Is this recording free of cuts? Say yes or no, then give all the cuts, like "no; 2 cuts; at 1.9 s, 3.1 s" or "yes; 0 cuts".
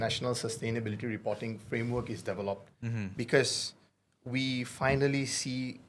yes; 0 cuts